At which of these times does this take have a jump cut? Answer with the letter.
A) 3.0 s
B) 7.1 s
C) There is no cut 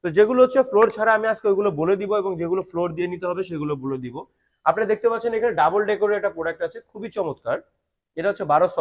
C